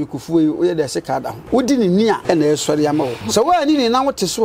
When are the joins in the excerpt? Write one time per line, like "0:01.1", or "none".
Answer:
0:01.4
0:02.2
0:03.2